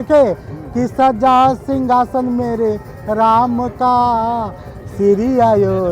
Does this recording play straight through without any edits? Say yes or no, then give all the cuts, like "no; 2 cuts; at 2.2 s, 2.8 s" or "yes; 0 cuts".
yes; 0 cuts